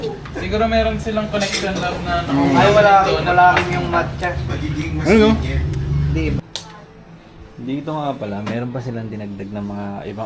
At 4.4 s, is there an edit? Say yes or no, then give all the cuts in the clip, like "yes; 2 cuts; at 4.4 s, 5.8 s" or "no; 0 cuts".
no; 1 cut; at 6.4 s